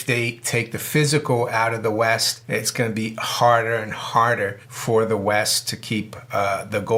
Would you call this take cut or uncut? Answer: uncut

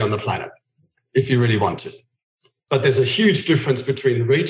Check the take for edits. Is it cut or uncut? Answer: cut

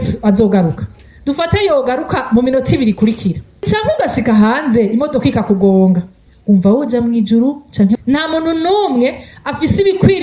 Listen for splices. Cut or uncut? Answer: cut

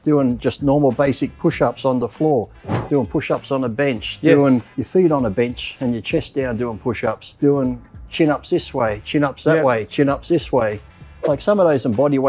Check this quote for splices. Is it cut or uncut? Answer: cut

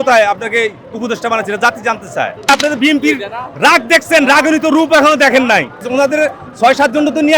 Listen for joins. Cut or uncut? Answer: cut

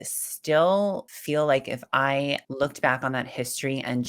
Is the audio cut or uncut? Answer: cut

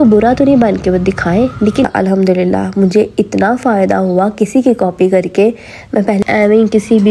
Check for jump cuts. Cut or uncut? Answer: cut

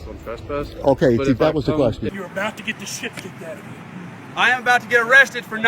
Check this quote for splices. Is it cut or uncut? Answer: cut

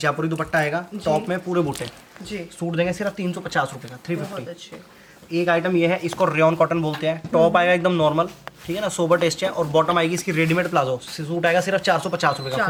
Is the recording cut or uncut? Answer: uncut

